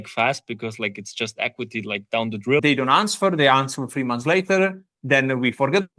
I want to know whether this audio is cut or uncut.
cut